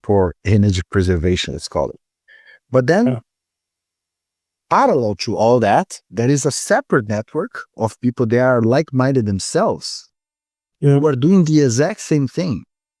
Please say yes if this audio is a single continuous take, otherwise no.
yes